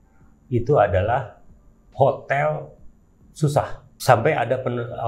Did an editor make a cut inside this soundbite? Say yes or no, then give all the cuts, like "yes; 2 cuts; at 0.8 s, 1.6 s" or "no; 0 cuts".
no; 0 cuts